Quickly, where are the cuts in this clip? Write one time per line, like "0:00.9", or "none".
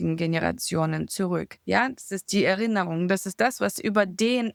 none